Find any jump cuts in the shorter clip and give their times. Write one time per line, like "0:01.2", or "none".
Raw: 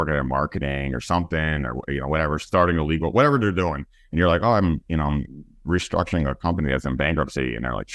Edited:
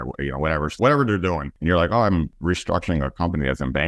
0:00.8
0:01.5
0:02.3